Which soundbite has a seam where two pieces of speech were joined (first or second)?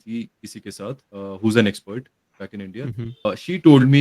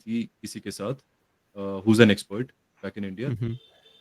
first